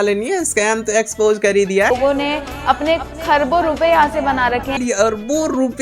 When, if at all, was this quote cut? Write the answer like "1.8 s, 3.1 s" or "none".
1.9 s, 4.7 s